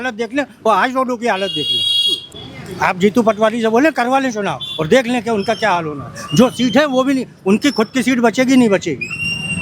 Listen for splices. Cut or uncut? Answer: cut